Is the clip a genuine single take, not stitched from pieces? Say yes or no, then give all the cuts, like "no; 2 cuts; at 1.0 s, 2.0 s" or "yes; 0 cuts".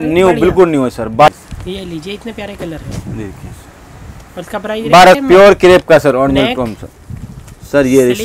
no; 2 cuts; at 1.3 s, 5.2 s